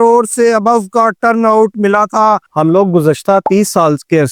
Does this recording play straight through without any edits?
no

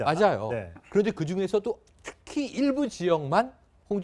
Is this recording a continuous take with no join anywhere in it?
no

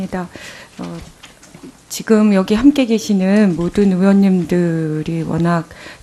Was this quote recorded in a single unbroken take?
yes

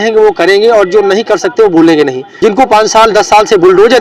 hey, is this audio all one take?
no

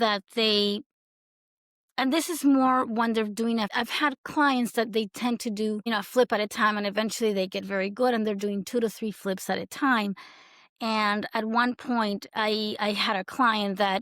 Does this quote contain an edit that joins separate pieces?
yes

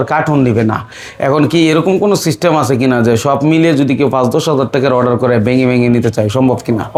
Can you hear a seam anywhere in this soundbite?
no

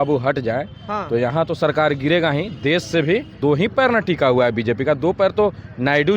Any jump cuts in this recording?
yes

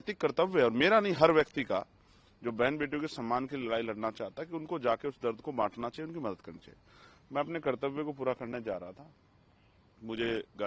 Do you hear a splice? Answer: no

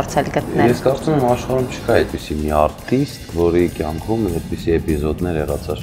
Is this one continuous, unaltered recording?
yes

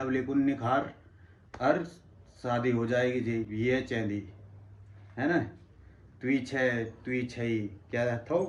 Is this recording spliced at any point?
no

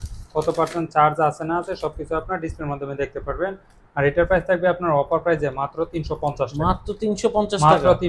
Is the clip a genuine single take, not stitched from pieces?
yes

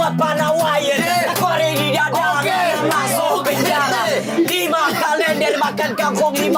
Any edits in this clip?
no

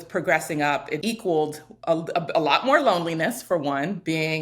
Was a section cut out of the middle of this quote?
yes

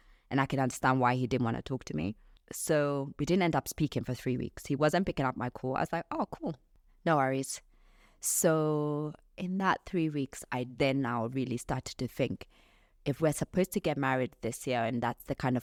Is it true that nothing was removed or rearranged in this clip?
yes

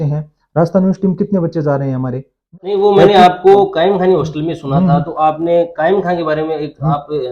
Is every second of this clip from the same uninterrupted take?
no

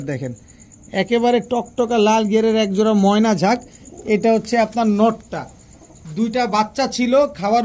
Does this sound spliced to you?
no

